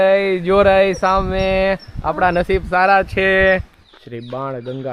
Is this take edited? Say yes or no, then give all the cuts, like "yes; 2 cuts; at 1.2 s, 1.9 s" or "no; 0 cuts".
yes; 1 cut; at 3.7 s